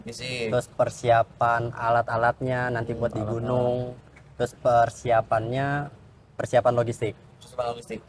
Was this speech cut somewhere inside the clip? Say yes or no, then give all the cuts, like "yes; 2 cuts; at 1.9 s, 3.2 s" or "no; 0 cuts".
no; 0 cuts